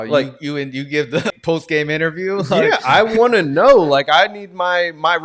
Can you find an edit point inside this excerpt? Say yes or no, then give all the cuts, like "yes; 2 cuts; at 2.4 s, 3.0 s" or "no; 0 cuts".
yes; 1 cut; at 1.3 s